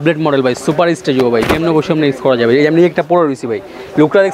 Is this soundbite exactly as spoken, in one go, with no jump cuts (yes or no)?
yes